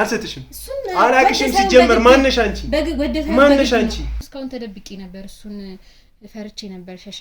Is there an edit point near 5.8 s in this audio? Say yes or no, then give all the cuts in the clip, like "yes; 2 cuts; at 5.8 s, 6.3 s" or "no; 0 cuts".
no; 1 cut; at 4.3 s